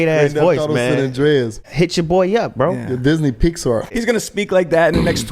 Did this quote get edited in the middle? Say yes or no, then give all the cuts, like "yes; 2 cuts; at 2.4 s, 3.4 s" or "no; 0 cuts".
yes; 2 cuts; at 1.7 s, 3.9 s